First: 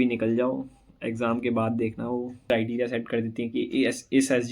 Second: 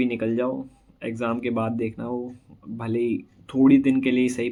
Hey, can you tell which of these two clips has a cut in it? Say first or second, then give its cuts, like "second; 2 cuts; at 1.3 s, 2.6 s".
first; 1 cut; at 2.4 s